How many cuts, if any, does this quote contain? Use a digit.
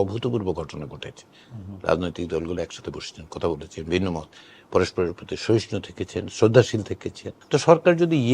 1